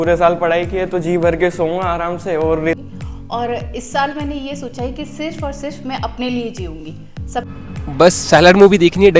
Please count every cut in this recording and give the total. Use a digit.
2